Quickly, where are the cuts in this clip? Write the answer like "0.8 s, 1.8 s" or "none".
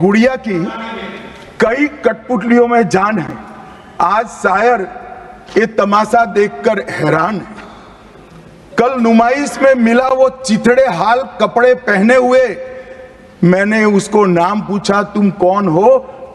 none